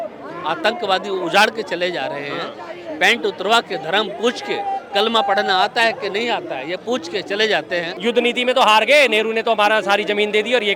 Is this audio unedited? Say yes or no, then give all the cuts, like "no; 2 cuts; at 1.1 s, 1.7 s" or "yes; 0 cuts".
no; 1 cut; at 7.9 s